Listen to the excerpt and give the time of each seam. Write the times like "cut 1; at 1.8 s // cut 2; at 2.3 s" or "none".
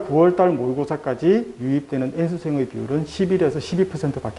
none